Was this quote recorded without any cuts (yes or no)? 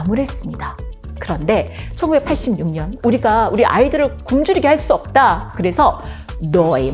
no